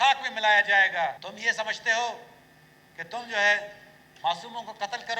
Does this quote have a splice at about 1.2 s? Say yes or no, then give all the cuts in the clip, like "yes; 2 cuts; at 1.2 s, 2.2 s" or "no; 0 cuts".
yes; 1 cut; at 1.2 s